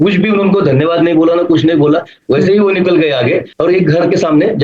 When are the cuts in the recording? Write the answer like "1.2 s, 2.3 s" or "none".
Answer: 3.5 s